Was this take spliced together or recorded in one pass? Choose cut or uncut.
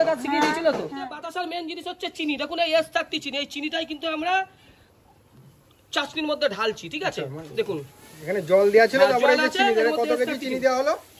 cut